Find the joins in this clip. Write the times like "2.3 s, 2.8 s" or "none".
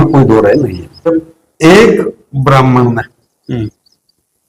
1.1 s